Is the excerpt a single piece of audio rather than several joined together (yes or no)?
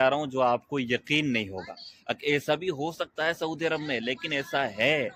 yes